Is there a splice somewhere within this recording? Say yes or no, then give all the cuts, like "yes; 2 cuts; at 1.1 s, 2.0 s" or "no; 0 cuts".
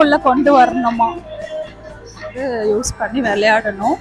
yes; 1 cut; at 2.4 s